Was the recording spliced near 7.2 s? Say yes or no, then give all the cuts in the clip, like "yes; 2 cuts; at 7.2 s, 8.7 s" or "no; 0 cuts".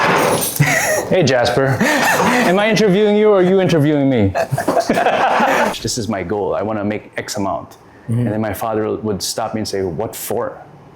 no; 1 cut; at 5.7 s